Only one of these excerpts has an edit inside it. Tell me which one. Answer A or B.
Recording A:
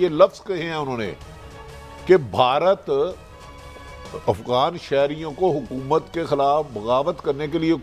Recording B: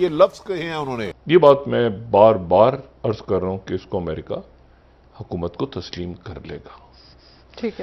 B